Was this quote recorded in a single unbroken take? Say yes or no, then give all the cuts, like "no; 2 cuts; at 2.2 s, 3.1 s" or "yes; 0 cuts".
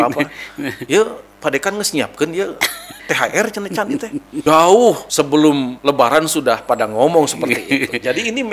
no; 4 cuts; at 2.9 s, 4.3 s, 5.1 s, 5.7 s